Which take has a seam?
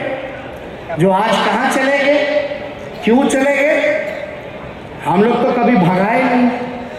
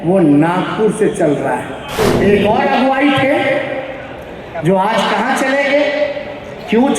second; 1 cut; at 2.0 s

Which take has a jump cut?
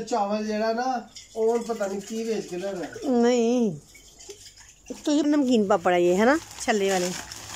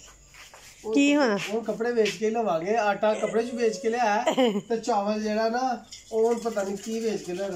first; 1 cut; at 5.2 s

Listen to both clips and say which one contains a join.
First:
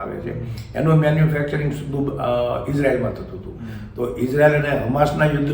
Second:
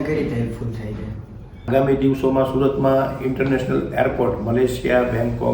second; 1 cut; at 1.7 s

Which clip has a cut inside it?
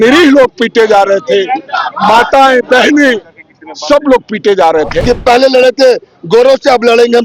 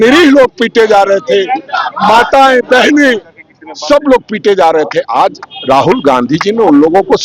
first; 1 cut; at 5.0 s

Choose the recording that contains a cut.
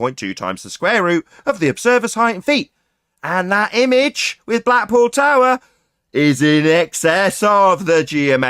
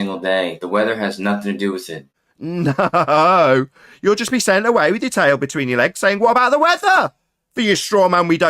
second; 1 cut; at 1.9 s

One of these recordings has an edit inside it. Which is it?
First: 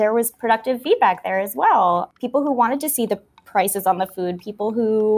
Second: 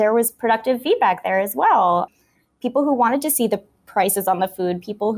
first; 1 cut; at 2.2 s

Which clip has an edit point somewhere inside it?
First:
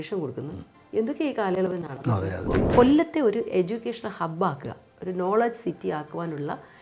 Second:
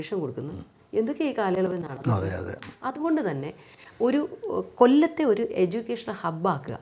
first; 1 cut; at 2.4 s

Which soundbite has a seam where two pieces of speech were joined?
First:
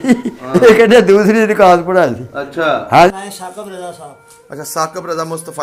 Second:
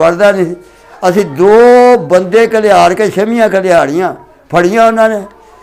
first; 1 cut; at 3.1 s

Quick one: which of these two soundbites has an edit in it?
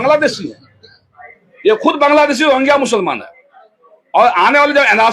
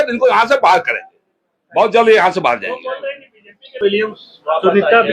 second; 1 cut; at 3.8 s

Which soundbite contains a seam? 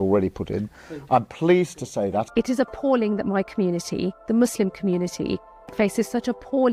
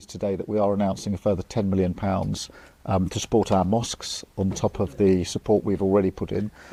first; 1 cut; at 2.3 s

